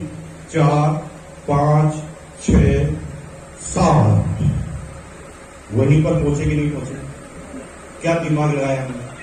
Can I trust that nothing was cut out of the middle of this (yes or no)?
yes